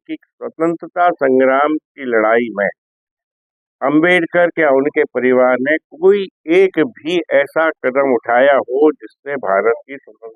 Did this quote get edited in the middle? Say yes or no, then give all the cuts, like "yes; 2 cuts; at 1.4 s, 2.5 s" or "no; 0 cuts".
no; 0 cuts